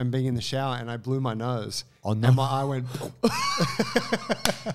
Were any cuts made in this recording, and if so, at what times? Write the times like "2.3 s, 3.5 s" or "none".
none